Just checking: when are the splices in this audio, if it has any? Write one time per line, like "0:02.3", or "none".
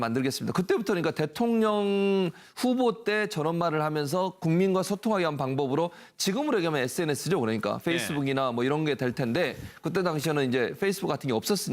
0:10.2